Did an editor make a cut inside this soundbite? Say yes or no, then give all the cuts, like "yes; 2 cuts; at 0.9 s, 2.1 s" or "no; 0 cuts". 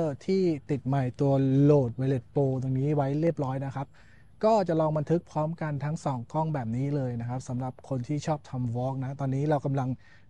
no; 0 cuts